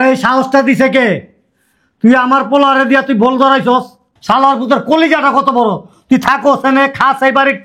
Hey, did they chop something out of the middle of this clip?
no; 0 cuts

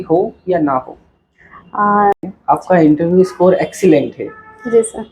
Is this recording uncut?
no; 1 cut; at 2.3 s

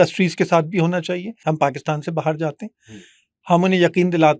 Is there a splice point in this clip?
yes; 1 cut; at 1.3 s

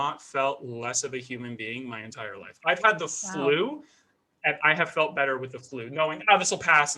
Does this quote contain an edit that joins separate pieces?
no; 0 cuts

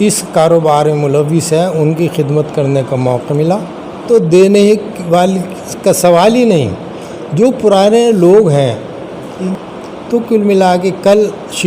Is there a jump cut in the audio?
yes; 2 cuts; at 4.0 s, 9.4 s

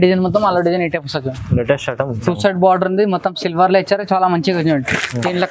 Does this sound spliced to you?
yes; 1 cut; at 2.1 s

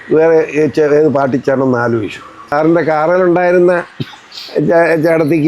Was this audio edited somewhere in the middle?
yes; 1 cut; at 2.5 s

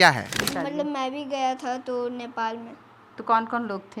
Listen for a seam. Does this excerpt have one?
no; 0 cuts

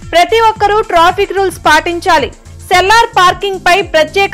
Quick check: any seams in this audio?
no; 0 cuts

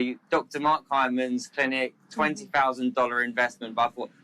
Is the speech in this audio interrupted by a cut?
no; 0 cuts

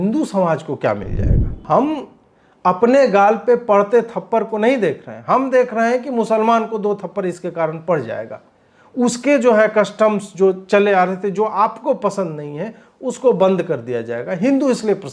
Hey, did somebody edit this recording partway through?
yes; 1 cut; at 1.6 s

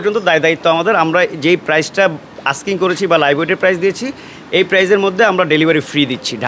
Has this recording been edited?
no; 0 cuts

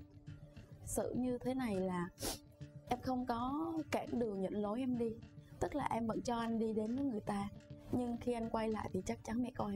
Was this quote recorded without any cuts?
yes; 0 cuts

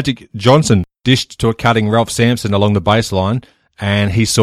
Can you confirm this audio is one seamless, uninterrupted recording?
no; 1 cut; at 0.9 s

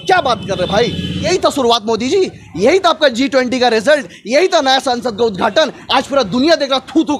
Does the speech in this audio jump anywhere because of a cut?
yes; 1 cut; at 1.3 s

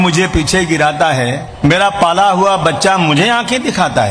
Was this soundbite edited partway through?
yes; 1 cut; at 1.4 s

